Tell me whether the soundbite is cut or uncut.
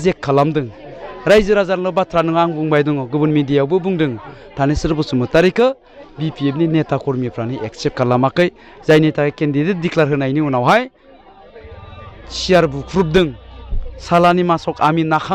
uncut